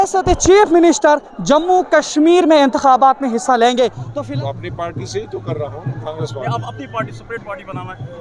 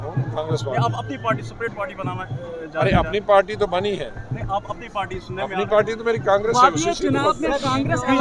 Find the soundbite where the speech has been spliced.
first; 1 cut; at 4.0 s

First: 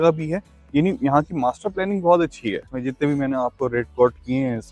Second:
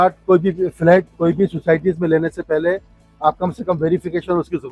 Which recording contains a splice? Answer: first; 1 cut; at 2.7 s

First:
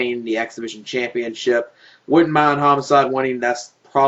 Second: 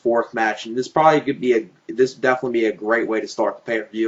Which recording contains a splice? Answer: second; 1 cut; at 2.8 s

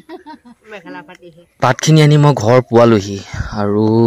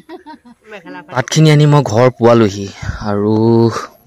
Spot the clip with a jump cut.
second; 1 cut; at 1.2 s

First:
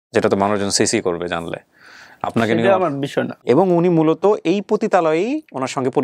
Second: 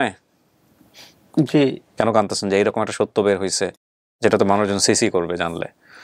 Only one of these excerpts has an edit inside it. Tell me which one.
first; 1 cut; at 3.4 s

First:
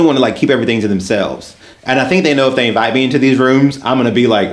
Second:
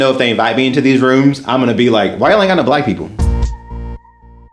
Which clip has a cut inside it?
second; 1 cut; at 3.1 s

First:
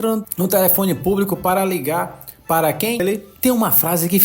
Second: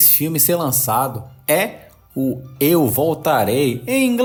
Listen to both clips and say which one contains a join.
first; 1 cut; at 3.0 s

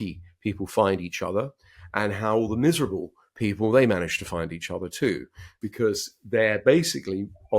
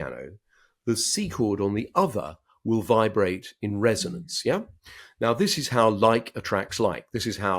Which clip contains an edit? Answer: first; 1 cut; at 5.5 s

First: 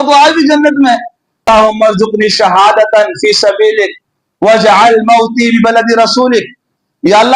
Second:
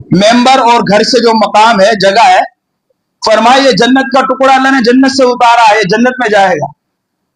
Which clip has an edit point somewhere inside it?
first; 1 cut; at 1.5 s

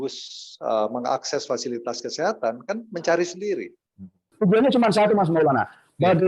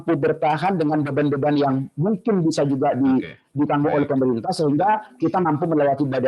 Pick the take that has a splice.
first; 1 cut; at 4.2 s

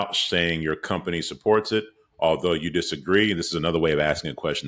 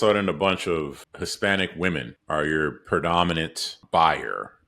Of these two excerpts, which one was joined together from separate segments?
second; 3 cuts; at 1.0 s, 2.1 s, 3.8 s

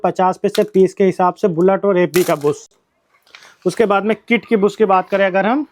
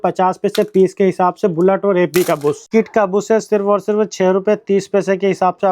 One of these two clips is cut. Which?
second; 1 cut; at 2.6 s

